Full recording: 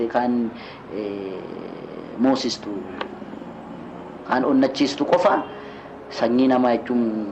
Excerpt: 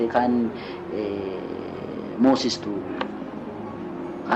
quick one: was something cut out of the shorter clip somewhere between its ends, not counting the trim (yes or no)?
no